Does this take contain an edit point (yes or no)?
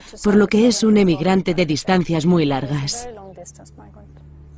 no